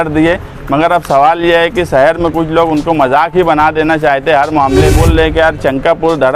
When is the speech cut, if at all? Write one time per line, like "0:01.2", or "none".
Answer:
0:04.9